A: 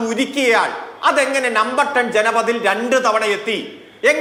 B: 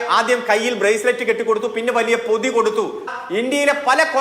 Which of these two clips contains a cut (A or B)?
B